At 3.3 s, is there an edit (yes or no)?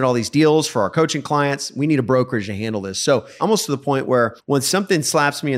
yes